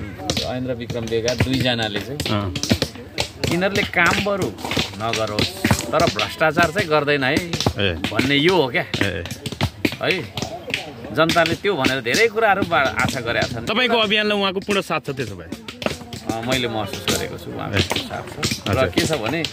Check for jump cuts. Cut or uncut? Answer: uncut